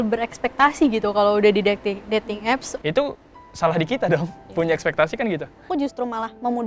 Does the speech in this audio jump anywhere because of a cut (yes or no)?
yes